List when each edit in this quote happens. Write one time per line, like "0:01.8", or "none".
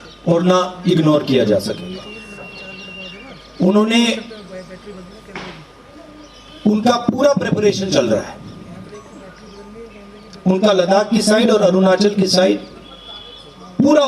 0:09.7